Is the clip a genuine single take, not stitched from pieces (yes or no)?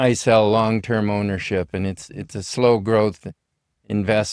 yes